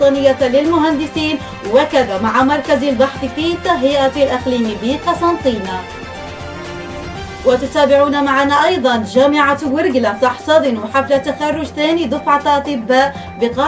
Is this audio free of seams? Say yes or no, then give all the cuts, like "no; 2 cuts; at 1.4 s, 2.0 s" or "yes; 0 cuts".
no; 2 cuts; at 5.8 s, 7.2 s